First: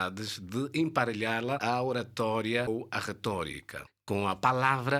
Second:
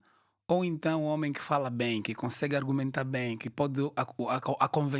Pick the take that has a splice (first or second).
first